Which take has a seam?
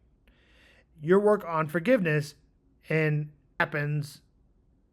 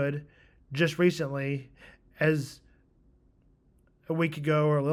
first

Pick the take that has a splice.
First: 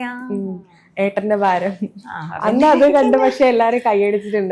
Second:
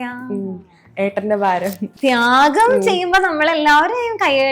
second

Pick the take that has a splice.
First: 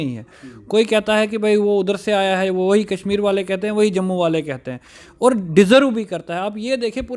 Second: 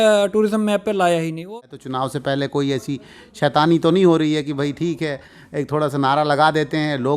second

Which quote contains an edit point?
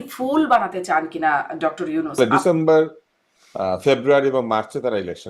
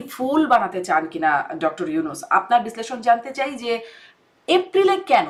first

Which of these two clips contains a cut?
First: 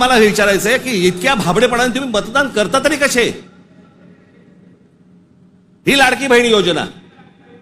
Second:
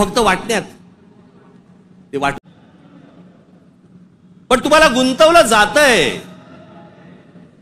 second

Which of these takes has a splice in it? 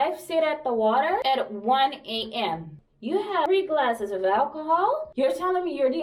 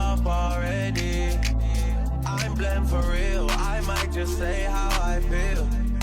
first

